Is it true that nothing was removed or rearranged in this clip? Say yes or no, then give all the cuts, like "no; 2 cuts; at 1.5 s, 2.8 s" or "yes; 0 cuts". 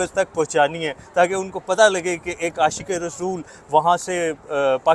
yes; 0 cuts